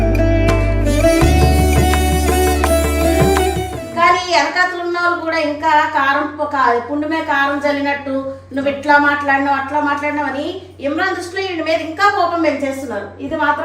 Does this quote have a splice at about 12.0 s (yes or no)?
no